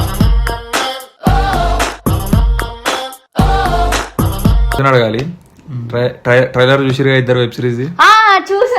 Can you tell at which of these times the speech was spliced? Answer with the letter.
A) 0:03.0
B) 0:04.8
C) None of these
B